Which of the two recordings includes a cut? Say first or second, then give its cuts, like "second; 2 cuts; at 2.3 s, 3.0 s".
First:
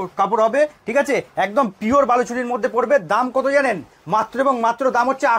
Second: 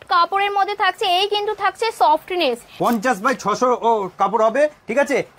second; 1 cut; at 2.7 s